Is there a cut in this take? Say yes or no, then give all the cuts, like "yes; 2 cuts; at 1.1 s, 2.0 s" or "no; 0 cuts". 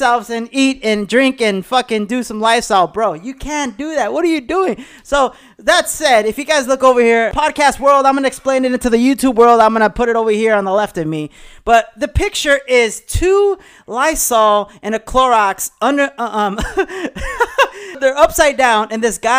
yes; 2 cuts; at 7.3 s, 18.0 s